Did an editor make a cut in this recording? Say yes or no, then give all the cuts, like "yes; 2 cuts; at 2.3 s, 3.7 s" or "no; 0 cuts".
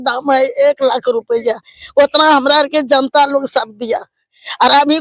no; 0 cuts